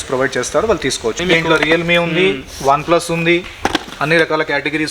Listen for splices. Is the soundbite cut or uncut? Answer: cut